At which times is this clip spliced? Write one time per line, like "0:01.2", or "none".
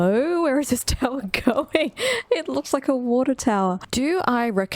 0:03.8